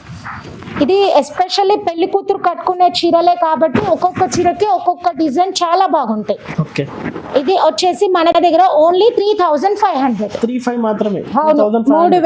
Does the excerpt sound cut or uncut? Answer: uncut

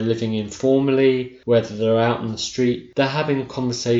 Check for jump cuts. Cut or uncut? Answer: cut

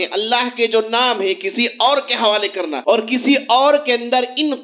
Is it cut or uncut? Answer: cut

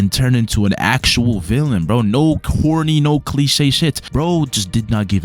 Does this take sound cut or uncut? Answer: uncut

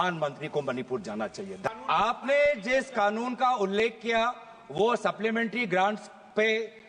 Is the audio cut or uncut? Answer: cut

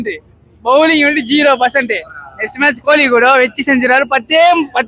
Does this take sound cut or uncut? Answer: uncut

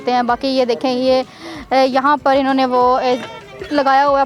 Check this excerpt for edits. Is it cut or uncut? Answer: uncut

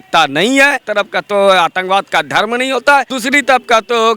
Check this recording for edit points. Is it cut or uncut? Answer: cut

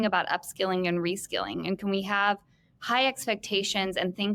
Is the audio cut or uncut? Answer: uncut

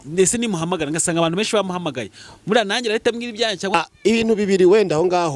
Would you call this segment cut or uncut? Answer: cut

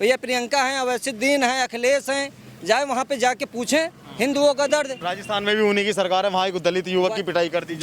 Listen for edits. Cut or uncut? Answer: uncut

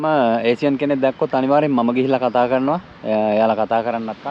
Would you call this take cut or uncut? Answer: uncut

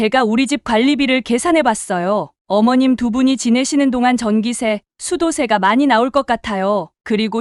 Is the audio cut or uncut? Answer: uncut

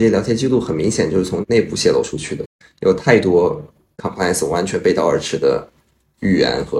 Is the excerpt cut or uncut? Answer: cut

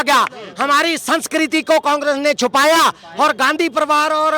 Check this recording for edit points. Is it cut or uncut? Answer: uncut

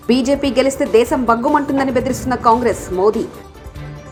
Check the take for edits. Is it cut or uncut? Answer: uncut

